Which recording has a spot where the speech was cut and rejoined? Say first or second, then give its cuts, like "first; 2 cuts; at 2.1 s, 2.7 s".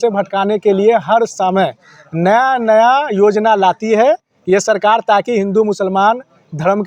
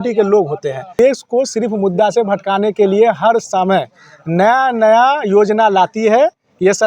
second; 1 cut; at 1.0 s